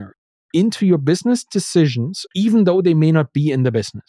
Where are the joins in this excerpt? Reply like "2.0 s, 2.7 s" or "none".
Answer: 2.1 s